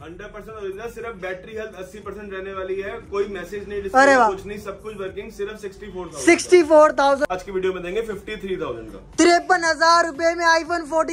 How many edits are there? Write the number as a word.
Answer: one